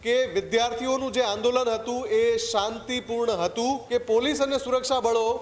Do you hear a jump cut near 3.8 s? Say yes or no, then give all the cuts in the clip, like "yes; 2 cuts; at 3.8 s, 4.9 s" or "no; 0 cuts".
yes; 1 cut; at 3.8 s